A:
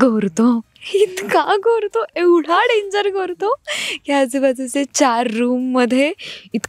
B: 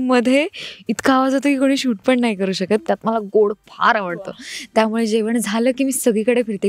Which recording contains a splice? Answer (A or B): B